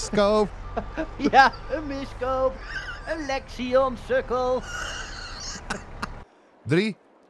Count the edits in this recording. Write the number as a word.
one